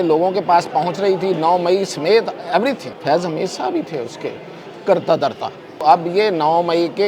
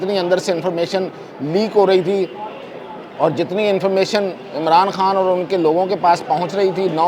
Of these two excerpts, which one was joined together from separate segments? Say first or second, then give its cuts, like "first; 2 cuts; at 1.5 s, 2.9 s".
first; 2 cuts; at 2.9 s, 5.8 s